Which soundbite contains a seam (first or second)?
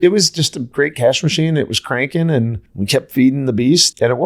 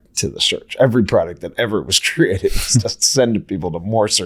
second